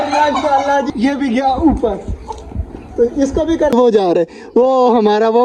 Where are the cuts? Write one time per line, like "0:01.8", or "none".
0:00.9
0:03.7